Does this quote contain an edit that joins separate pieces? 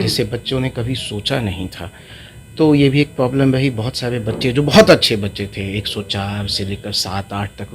no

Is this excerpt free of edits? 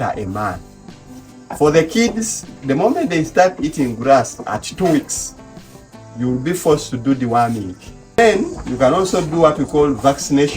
no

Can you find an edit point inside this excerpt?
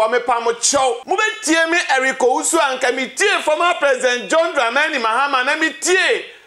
yes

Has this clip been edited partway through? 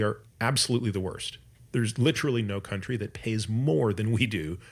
no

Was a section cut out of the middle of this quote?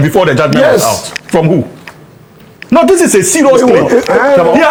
no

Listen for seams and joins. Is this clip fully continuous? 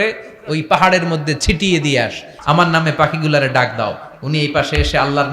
no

